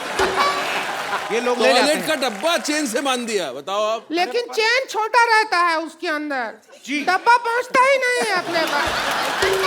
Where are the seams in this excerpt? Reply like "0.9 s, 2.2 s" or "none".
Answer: 1.2 s